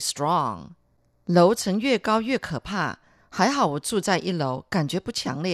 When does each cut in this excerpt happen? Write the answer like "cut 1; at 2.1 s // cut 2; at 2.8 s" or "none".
cut 1; at 1.0 s